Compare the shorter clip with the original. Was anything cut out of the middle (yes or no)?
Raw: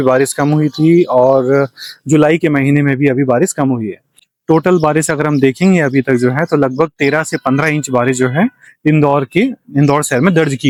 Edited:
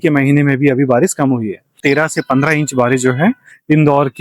yes